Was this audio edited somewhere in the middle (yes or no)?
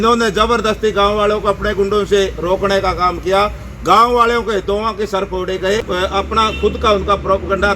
yes